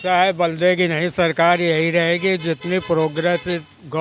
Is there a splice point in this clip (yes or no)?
no